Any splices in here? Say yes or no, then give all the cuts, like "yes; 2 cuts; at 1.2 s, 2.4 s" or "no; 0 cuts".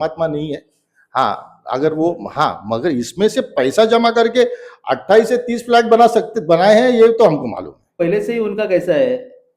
yes; 1 cut; at 7.9 s